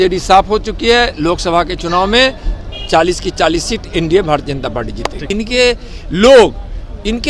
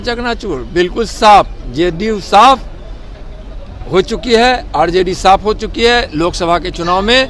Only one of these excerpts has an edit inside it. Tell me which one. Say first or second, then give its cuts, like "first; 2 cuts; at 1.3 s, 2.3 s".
first; 1 cut; at 5.2 s